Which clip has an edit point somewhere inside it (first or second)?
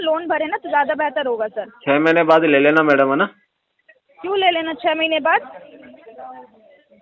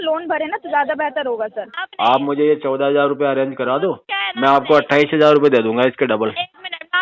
second